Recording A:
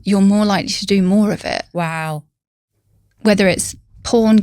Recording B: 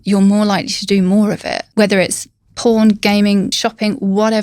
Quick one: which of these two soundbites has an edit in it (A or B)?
B